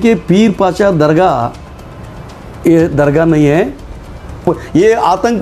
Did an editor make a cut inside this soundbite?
yes; 1 cut; at 4.4 s

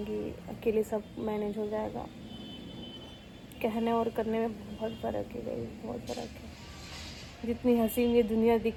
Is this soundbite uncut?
yes; 0 cuts

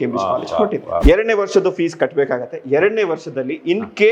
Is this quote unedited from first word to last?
no; 1 cut; at 1.0 s

